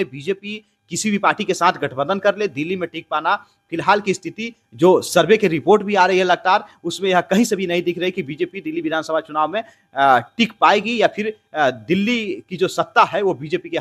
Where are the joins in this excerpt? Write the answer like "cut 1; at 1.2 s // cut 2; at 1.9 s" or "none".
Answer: none